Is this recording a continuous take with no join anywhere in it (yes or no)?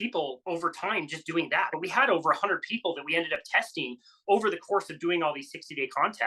no